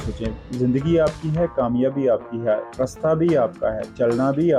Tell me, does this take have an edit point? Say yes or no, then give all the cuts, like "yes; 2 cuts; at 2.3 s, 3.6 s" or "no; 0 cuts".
no; 0 cuts